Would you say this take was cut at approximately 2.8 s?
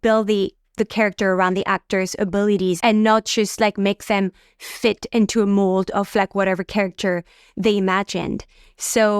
yes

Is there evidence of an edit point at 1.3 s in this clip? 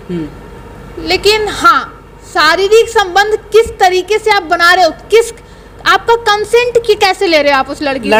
no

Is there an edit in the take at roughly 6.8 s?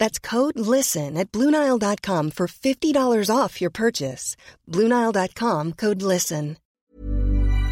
yes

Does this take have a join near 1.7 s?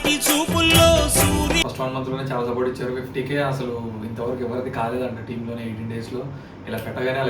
yes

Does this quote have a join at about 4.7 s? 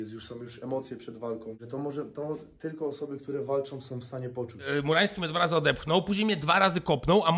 yes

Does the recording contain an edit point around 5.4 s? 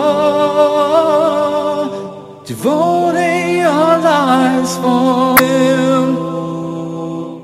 yes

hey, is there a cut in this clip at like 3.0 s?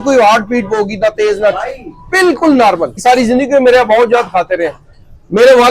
yes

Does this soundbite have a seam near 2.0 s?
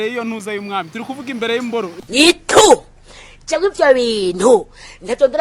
yes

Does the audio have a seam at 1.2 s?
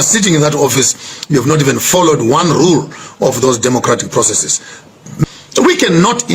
no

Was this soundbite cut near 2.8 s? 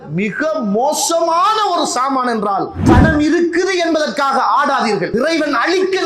yes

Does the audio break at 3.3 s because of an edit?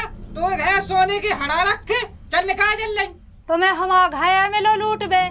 yes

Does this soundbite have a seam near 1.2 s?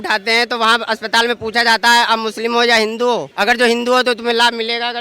no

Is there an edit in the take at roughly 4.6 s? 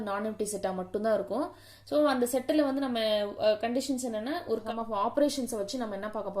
yes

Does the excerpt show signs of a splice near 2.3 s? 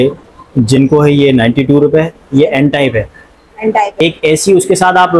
no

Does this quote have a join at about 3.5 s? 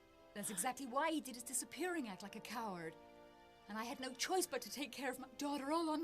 no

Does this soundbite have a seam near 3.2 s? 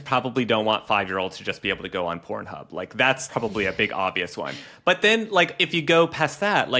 yes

